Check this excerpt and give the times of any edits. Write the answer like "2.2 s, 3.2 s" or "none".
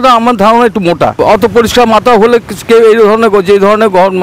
1.2 s